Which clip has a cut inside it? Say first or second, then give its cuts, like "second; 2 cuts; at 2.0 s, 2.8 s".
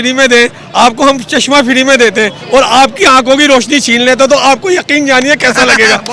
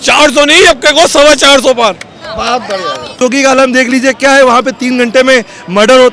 second; 1 cut; at 3.2 s